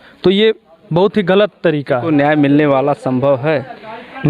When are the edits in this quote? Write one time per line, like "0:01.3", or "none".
0:02.0